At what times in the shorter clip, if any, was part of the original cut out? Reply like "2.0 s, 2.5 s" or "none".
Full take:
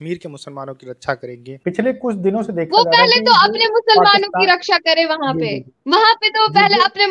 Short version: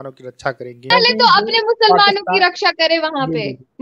0.9 s

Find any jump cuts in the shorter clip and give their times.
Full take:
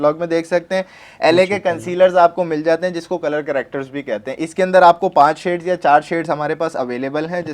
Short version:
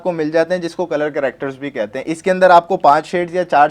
none

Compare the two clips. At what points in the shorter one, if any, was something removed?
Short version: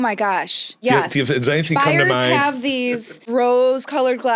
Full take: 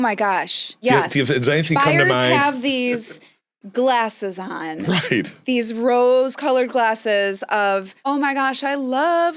3.2 s

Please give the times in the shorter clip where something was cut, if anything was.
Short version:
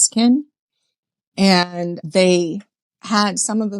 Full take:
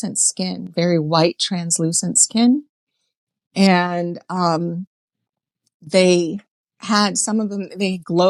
2.0 s

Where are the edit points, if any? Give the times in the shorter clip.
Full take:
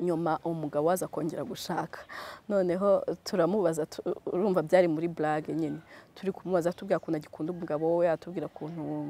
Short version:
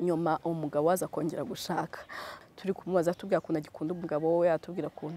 2.3 s

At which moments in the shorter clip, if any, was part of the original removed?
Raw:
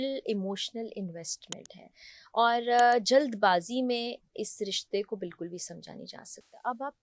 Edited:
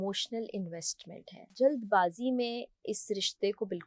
1.5 s

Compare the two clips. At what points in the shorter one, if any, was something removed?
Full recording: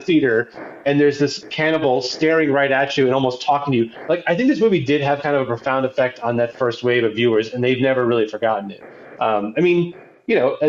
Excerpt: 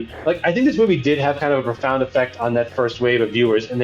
none

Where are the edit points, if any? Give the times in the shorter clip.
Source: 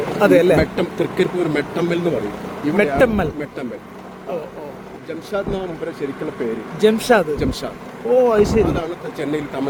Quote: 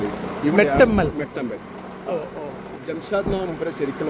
none

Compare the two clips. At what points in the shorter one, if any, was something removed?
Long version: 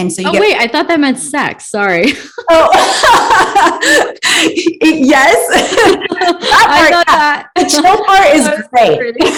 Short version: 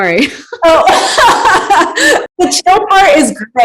2.3 s

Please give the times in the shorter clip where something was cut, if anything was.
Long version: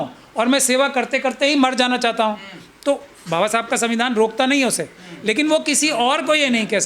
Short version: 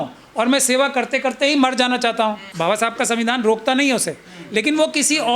2.5 s

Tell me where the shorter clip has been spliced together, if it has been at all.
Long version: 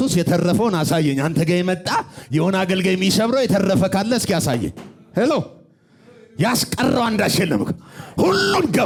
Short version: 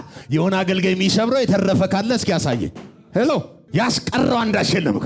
3.6 s

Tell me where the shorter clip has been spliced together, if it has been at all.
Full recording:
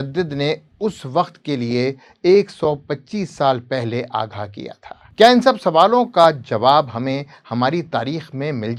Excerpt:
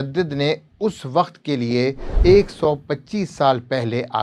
none

